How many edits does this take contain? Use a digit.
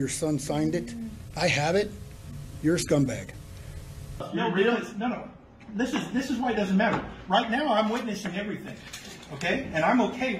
1